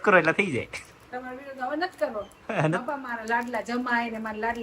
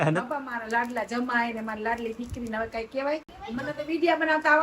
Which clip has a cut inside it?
second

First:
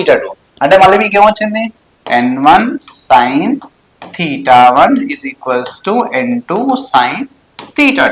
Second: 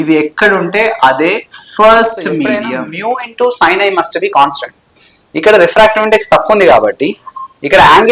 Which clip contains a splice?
second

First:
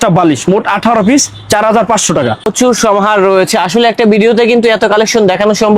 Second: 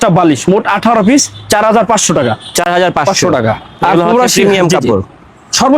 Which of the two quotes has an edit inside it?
first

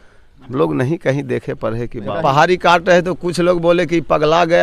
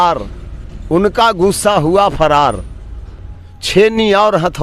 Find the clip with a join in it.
first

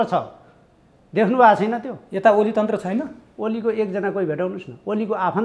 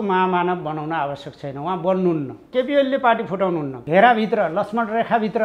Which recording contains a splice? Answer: second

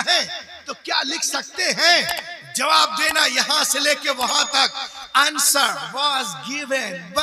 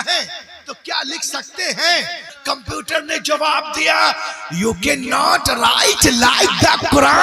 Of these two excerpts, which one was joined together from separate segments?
second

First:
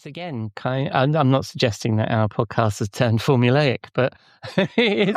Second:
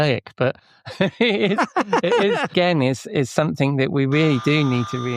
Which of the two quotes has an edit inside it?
second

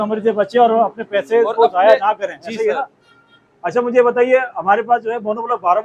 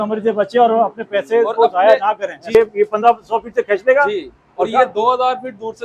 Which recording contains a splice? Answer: second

